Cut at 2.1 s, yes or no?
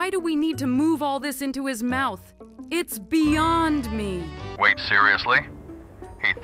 no